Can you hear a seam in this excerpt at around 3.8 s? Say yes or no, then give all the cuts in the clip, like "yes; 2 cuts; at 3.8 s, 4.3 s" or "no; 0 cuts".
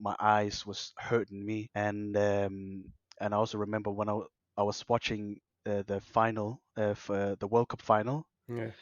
no; 1 cut; at 1.7 s